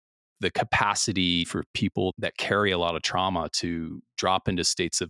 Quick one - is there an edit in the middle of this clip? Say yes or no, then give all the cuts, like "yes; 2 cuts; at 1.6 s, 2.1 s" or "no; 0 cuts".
yes; 1 cut; at 2.1 s